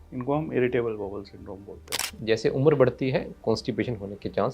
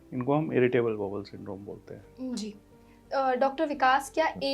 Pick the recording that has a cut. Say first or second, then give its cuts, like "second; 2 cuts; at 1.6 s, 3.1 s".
first; 1 cut; at 2.1 s